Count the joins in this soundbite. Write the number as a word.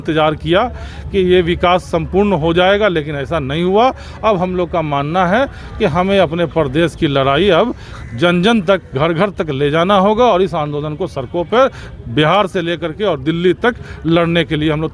zero